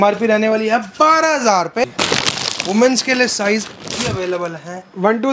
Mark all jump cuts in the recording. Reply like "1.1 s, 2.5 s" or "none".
1.8 s